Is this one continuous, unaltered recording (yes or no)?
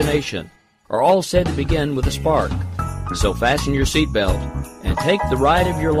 yes